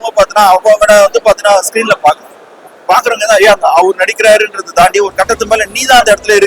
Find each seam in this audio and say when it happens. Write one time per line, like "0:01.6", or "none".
none